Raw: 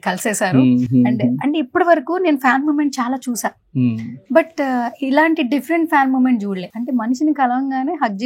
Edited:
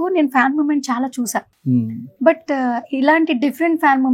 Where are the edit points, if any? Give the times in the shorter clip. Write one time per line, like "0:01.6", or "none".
none